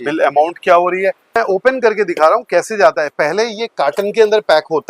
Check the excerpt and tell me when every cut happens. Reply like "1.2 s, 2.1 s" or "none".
1.4 s